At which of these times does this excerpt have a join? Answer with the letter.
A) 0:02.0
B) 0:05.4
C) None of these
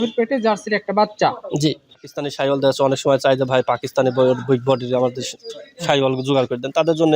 A